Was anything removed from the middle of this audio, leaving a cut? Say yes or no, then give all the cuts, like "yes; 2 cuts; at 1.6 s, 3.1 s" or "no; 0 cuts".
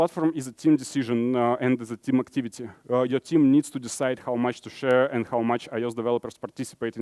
no; 0 cuts